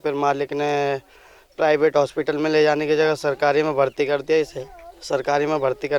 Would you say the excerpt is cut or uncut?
uncut